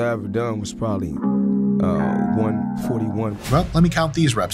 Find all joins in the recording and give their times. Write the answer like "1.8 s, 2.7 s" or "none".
3.4 s

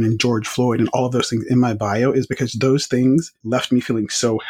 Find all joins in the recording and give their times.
3.4 s

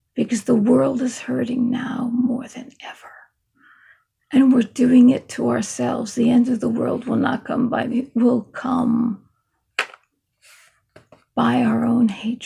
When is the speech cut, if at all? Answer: 7.9 s

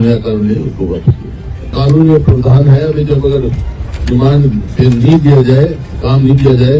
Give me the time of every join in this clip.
1.7 s

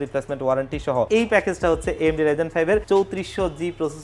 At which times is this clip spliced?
1.1 s, 2.8 s

